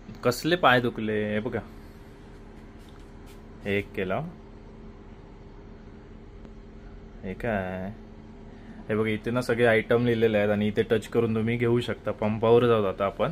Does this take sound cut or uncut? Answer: uncut